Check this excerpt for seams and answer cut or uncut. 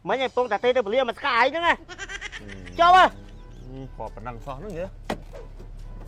uncut